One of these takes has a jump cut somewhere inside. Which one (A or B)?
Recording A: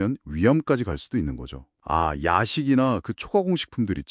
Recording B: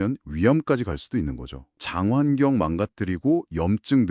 B